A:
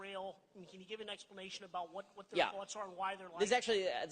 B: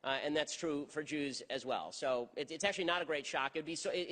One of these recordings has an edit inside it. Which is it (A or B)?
B